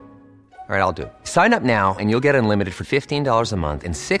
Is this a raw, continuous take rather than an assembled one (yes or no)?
yes